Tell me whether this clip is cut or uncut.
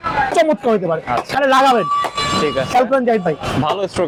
uncut